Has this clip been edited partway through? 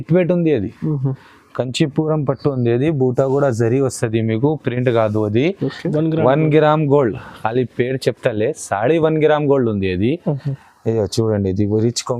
yes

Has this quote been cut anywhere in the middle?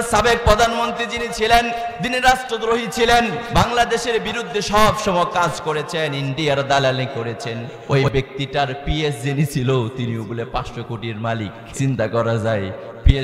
yes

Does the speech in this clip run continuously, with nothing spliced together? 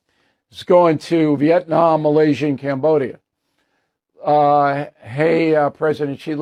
yes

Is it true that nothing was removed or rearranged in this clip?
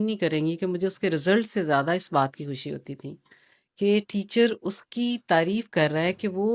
yes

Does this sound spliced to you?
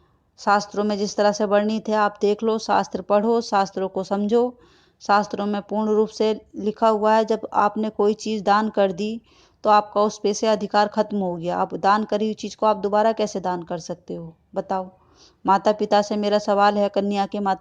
no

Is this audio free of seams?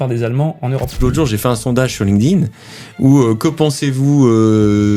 no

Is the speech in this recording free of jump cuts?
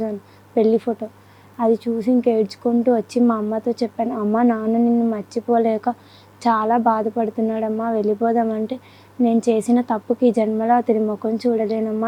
yes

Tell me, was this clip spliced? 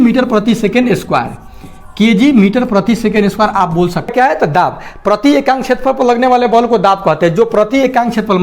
yes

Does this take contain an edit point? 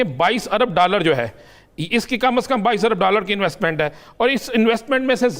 no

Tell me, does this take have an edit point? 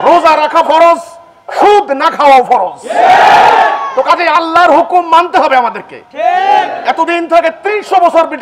no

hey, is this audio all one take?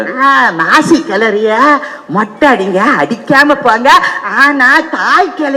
yes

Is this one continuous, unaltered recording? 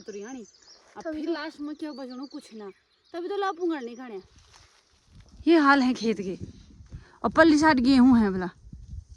no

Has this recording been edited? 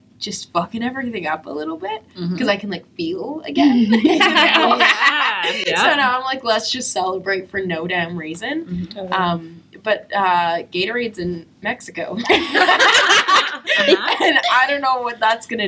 no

